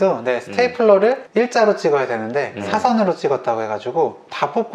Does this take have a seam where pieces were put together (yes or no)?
no